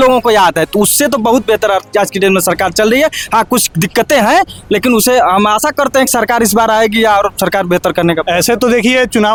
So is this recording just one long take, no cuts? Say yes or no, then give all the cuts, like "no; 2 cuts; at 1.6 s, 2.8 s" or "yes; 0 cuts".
yes; 0 cuts